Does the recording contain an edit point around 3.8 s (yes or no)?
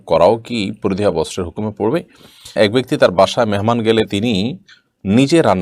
no